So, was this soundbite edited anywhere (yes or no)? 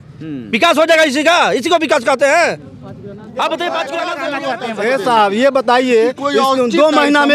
yes